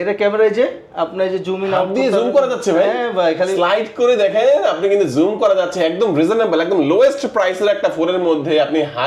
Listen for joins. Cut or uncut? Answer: uncut